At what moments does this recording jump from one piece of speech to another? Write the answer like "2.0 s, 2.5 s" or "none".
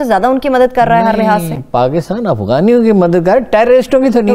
none